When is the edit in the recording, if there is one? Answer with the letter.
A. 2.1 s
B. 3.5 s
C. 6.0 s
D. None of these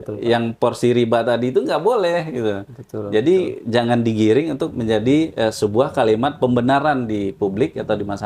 D